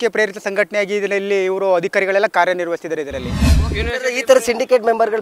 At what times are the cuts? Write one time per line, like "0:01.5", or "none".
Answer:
0:03.5